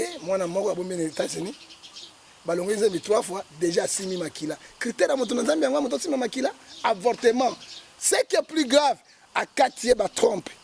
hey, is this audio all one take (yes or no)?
yes